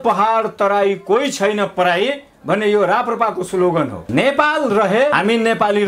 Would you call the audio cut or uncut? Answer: cut